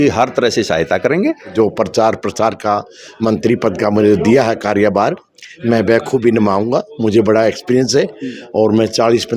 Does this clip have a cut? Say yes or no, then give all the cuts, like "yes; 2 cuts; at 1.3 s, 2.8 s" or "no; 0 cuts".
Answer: yes; 1 cut; at 1.5 s